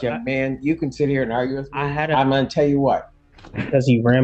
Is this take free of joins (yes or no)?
no